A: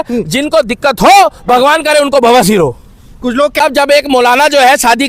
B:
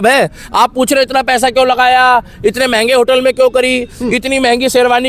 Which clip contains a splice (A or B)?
A